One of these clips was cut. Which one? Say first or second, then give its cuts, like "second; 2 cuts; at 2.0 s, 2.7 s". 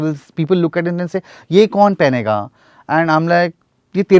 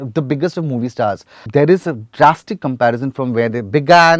second; 1 cut; at 1.4 s